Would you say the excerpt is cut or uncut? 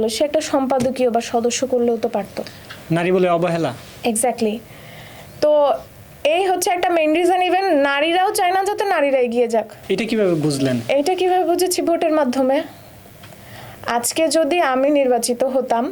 uncut